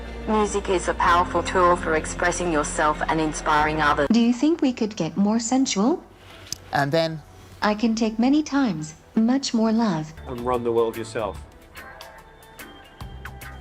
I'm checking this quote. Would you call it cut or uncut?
cut